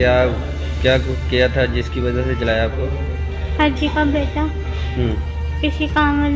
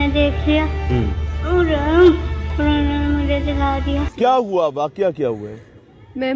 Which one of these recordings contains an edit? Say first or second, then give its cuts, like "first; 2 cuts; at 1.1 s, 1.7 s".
second; 1 cut; at 4.1 s